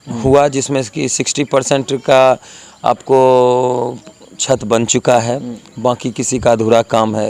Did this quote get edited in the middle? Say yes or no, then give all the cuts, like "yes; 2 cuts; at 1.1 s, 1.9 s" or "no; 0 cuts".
no; 0 cuts